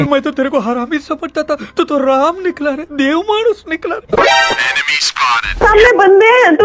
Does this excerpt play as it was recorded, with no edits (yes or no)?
no